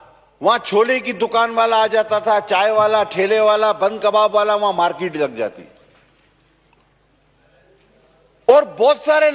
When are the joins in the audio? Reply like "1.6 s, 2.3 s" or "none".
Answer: none